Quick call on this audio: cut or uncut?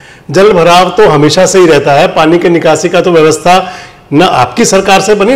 uncut